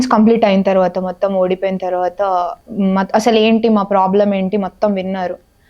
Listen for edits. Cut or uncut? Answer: cut